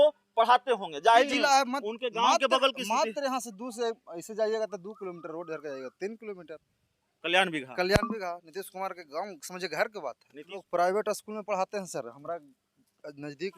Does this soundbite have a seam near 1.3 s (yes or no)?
yes